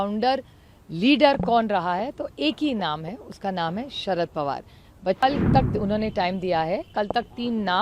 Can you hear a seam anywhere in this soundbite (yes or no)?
yes